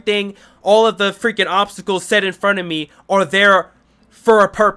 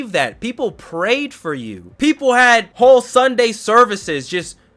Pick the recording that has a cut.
second; 2 cuts; at 1.8 s, 2.7 s

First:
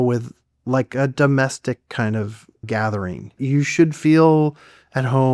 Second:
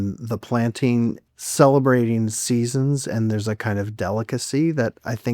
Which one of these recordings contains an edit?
second; 1 cut; at 1.3 s

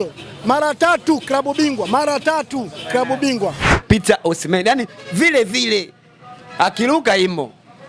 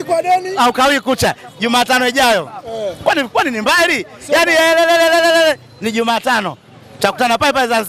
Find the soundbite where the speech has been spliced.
first; 1 cut; at 3.7 s

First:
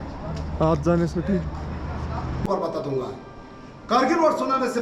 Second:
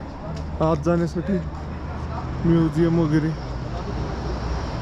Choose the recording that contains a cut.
first; 1 cut; at 2.5 s

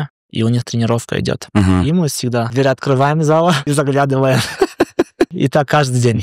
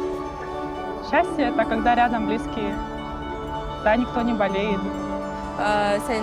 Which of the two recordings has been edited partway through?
first; 3 cuts; at 2.5 s, 3.6 s, 5.3 s

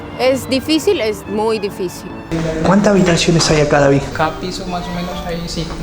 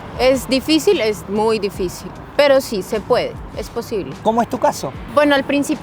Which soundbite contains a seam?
first; 2 cuts; at 2.2 s, 4.1 s

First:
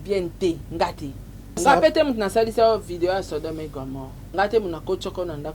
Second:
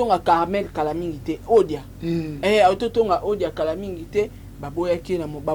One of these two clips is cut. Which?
first; 2 cuts; at 1.6 s, 4.2 s

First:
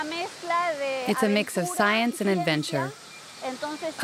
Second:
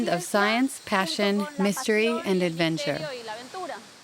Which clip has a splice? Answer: second; 1 cut; at 2.9 s

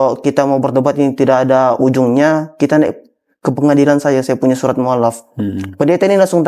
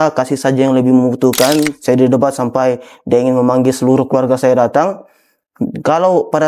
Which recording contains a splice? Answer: second; 1 cut; at 1.7 s

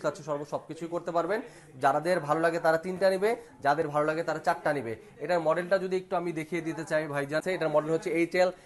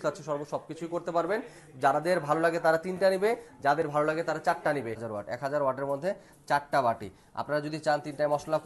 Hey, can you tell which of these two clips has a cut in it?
second; 1 cut; at 5.0 s

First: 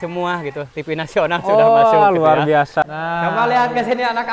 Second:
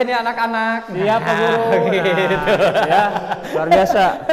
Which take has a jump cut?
first; 1 cut; at 2.8 s

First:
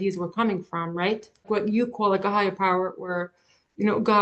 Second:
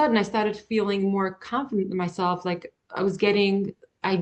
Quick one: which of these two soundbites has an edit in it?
first; 1 cut; at 1.3 s

